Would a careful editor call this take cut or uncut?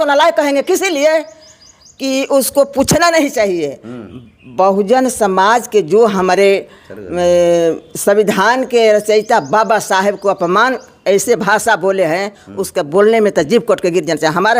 uncut